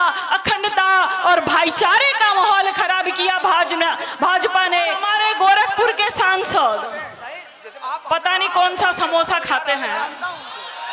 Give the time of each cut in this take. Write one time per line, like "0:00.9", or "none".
0:05.0